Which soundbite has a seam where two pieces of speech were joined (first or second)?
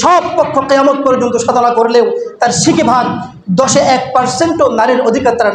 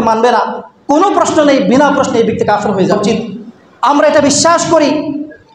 second